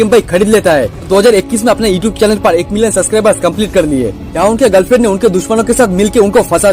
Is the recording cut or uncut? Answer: cut